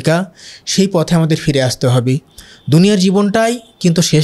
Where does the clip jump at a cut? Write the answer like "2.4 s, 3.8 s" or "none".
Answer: none